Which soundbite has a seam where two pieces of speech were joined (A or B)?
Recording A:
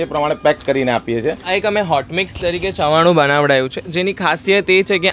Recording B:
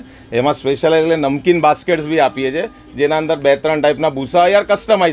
A